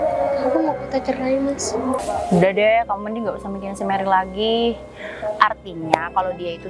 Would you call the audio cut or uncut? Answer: cut